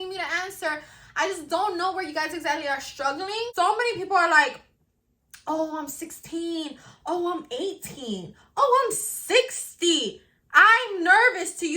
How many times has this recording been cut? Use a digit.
1